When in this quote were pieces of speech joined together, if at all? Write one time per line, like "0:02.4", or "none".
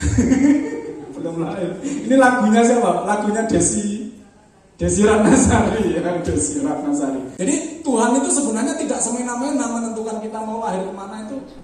0:07.3